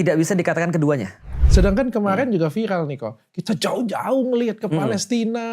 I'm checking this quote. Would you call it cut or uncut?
cut